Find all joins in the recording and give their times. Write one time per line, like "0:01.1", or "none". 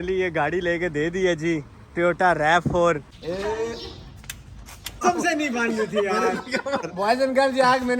0:03.2
0:05.0

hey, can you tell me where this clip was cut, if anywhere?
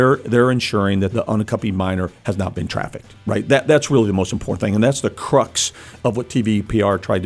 0:01.1

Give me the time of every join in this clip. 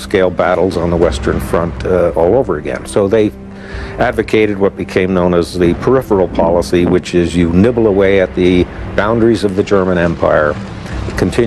0:02.8

